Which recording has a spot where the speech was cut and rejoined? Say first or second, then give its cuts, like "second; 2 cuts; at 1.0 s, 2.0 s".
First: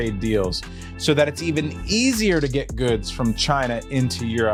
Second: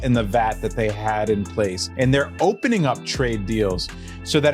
second; 1 cut; at 1.8 s